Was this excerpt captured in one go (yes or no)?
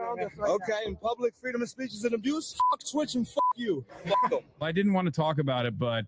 no